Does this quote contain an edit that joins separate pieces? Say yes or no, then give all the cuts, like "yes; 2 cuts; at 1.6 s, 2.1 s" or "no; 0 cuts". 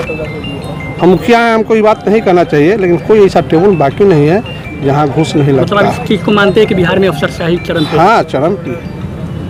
no; 0 cuts